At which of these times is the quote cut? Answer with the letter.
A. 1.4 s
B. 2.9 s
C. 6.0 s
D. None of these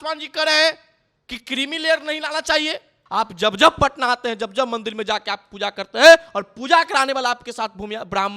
B